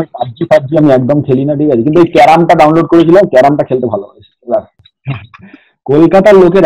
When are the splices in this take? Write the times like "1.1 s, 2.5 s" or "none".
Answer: 4.8 s